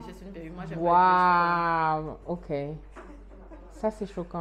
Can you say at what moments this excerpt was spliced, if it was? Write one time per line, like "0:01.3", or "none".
none